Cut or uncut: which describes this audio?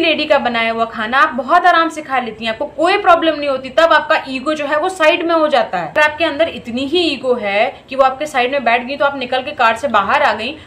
uncut